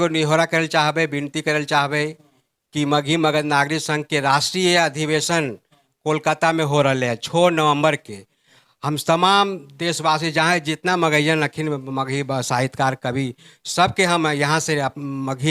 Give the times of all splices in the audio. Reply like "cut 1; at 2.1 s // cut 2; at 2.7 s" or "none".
none